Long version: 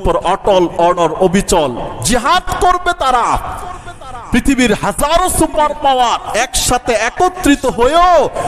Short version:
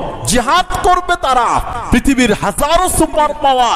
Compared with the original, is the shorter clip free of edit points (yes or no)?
no